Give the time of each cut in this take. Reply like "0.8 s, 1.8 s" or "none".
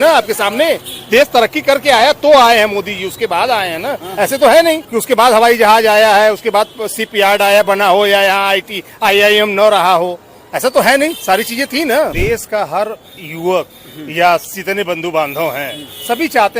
0.9 s, 4.9 s, 12.1 s, 14.5 s

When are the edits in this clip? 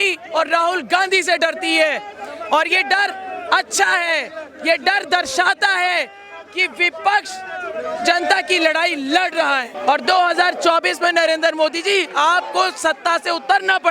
9.7 s

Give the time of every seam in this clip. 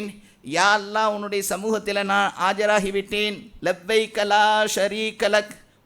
3.5 s

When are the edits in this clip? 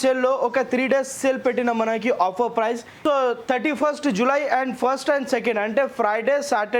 2.9 s

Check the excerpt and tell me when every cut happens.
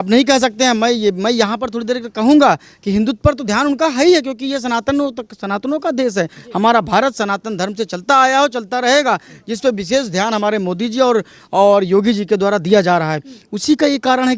none

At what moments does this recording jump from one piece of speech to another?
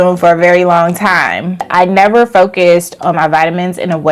1.7 s

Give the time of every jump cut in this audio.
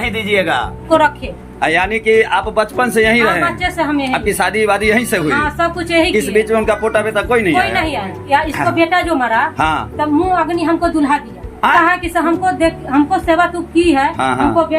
0.9 s, 8.3 s, 11.7 s

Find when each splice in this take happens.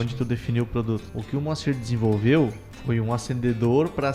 1.1 s, 2.7 s

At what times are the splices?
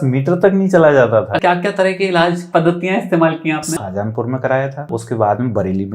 1.4 s, 3.8 s, 4.8 s

